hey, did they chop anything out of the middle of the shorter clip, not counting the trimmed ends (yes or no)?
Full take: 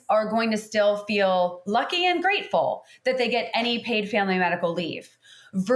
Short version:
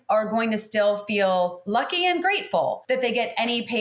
yes